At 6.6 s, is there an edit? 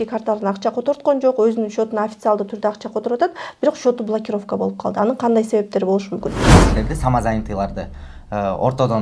yes; 1 cut; at 6.6 s

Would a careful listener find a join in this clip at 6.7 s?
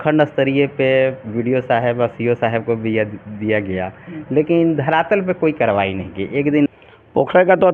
yes; 1 cut; at 6.7 s

